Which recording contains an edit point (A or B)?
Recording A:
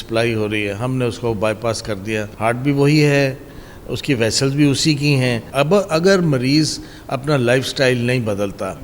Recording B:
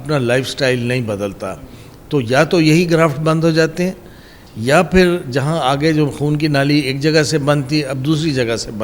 A